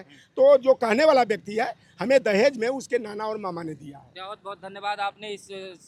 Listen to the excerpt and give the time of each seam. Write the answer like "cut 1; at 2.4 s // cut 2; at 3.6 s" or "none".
none